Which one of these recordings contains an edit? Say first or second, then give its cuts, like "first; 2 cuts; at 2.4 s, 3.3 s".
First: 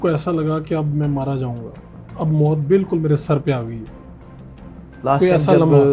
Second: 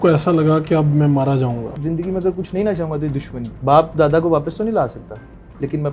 second; 2 cuts; at 1.8 s, 3.4 s